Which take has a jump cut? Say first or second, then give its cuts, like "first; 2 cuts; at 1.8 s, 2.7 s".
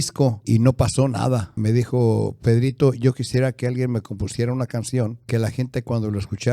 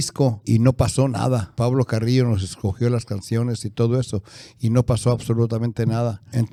first; 1 cut; at 1.5 s